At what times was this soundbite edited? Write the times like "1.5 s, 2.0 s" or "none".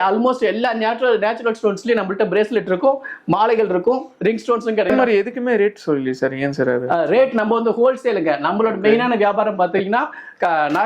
4.9 s